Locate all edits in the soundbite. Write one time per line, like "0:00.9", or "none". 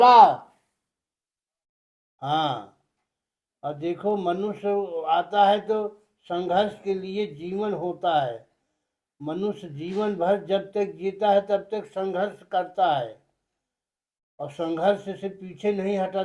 none